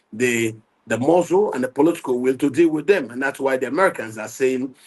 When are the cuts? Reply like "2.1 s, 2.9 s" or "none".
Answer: none